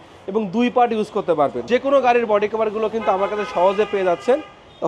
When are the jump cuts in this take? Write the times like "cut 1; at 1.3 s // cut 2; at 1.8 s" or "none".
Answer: cut 1; at 1.6 s